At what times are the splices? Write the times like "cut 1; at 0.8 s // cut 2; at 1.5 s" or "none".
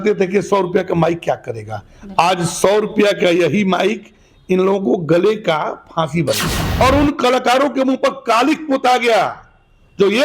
cut 1; at 6.6 s